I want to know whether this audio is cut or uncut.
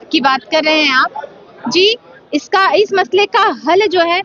uncut